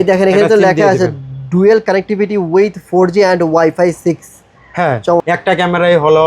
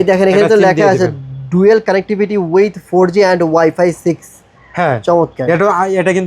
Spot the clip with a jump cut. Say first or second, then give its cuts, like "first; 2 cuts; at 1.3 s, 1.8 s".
first; 1 cut; at 5.2 s